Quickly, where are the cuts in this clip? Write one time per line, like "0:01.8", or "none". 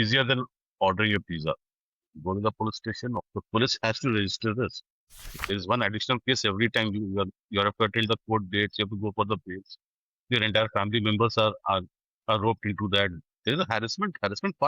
0:03.1
0:05.4